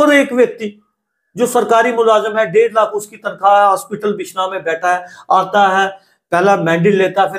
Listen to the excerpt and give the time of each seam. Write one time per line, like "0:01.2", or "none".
none